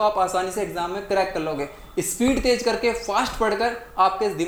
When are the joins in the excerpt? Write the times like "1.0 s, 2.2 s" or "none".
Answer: none